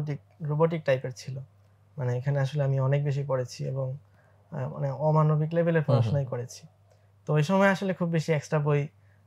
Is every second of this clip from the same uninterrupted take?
yes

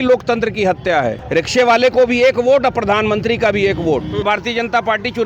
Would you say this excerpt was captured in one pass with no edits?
no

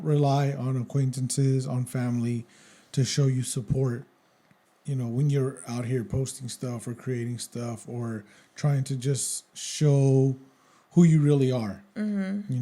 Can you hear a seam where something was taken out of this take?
no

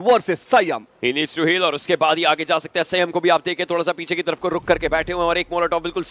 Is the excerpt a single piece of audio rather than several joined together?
yes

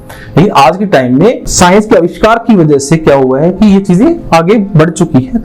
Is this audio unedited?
no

